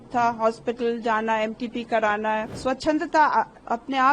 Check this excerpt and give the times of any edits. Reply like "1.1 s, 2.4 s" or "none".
2.5 s